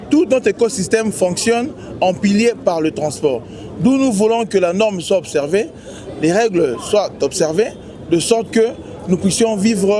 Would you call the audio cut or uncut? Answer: uncut